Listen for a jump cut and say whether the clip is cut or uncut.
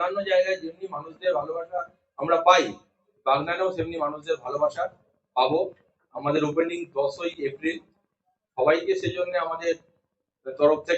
uncut